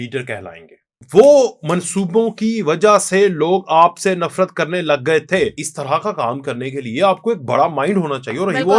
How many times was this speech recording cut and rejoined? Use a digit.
2